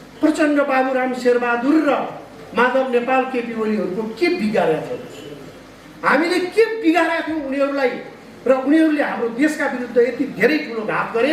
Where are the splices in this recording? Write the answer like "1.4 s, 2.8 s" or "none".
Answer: none